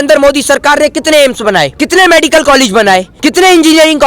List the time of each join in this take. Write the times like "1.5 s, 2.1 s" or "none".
1.8 s, 3.2 s